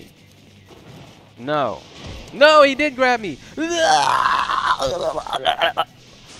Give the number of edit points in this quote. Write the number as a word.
zero